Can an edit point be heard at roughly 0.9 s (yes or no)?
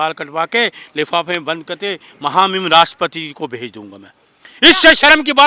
no